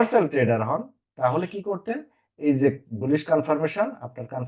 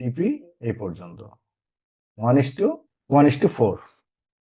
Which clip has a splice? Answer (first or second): second